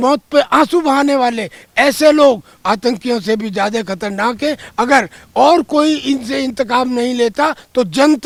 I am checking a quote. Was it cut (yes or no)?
no